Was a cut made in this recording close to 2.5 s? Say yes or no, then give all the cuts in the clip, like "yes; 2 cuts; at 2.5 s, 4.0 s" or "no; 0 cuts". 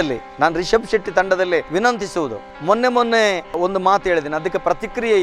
no; 0 cuts